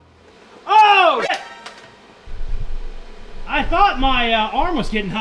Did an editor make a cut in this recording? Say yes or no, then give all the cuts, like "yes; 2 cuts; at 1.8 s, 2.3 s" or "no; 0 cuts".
yes; 1 cut; at 1.3 s